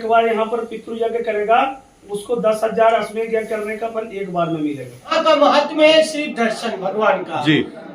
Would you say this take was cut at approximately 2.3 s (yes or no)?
no